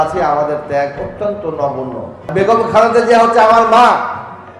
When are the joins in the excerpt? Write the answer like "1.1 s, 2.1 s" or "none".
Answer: 2.3 s

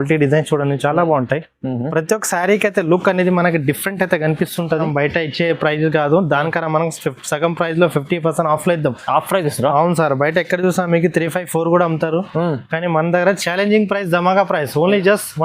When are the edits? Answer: 4.9 s

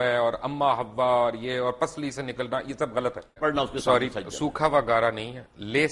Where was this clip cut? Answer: 3.4 s

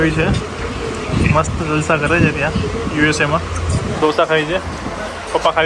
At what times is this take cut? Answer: 4.0 s

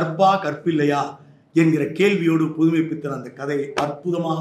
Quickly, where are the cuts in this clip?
none

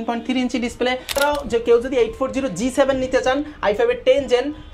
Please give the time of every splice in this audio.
1.2 s

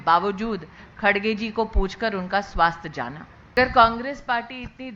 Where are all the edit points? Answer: 3.5 s

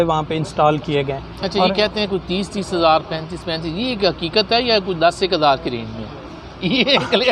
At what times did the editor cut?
none

